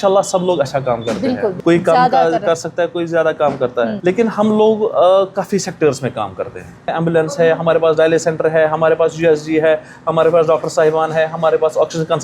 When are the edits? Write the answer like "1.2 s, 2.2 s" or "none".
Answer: 1.6 s, 4.0 s, 6.9 s